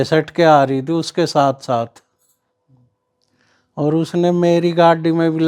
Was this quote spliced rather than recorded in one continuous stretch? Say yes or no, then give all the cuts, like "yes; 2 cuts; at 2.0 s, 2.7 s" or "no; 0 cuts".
no; 0 cuts